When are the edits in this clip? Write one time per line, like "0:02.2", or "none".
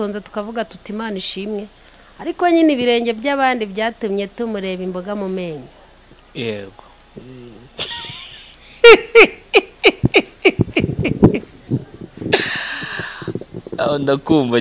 none